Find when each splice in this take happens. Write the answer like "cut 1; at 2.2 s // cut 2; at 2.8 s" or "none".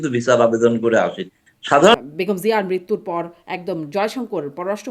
cut 1; at 1.9 s